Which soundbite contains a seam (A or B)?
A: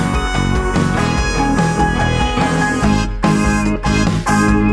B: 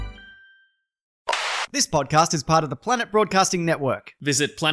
B